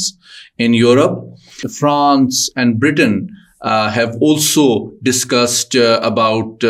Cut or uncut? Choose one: cut